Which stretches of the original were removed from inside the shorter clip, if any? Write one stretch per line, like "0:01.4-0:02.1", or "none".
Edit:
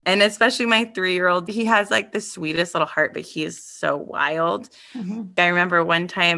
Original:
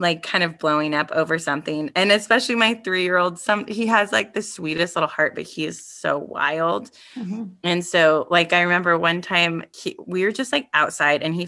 0:03.4-0:03.7
0:07.5-0:08.5